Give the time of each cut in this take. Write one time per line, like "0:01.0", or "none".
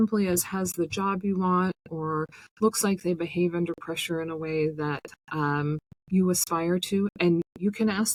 none